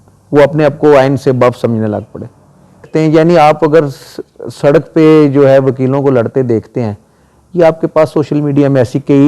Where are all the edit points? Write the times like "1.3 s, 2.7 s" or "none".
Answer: 2.8 s

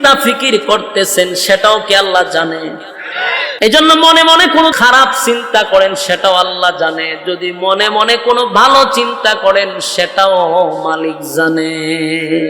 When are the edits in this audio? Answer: 3.5 s, 4.7 s

